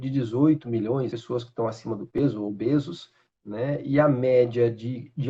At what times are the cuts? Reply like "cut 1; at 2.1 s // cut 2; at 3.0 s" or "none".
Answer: cut 1; at 1.1 s